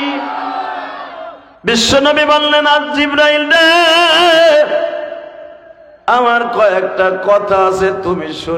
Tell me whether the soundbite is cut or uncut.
cut